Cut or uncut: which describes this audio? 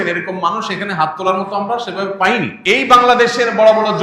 cut